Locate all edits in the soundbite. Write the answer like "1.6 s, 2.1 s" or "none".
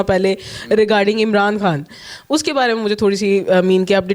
none